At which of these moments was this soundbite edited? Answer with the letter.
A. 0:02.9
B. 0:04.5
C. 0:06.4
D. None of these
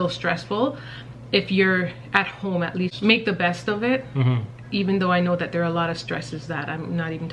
A